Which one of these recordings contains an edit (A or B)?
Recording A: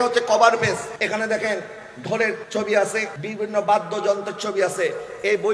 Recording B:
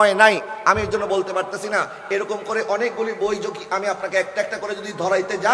A